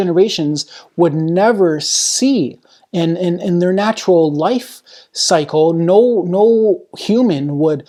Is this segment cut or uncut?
uncut